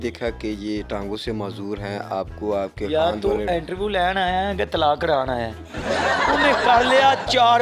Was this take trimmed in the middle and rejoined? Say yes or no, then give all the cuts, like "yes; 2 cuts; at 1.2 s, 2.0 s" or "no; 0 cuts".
no; 0 cuts